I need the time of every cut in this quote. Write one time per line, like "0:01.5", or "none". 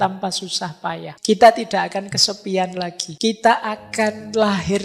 0:01.1
0:03.0